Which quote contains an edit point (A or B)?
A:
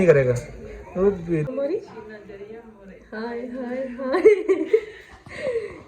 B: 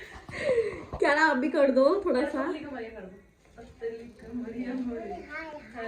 A